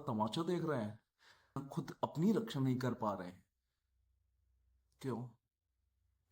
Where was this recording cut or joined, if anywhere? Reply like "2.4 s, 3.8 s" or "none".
1.6 s